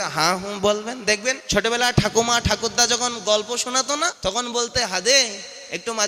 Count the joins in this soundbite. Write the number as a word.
two